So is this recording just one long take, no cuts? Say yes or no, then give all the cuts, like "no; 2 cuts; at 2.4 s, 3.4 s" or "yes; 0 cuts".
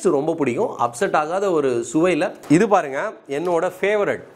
no; 1 cut; at 2.4 s